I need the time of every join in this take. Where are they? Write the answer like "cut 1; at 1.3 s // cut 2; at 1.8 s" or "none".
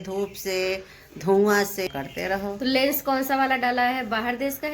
cut 1; at 1.9 s